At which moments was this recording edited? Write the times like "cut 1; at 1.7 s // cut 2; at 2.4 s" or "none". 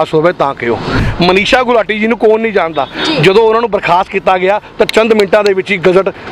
cut 1; at 1.0 s